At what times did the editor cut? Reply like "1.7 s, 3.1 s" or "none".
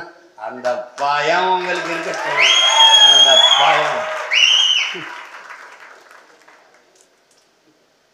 none